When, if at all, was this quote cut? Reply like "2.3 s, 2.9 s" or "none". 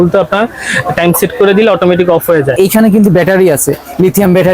2.5 s